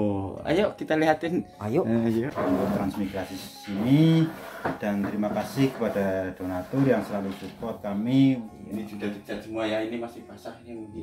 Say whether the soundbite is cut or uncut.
cut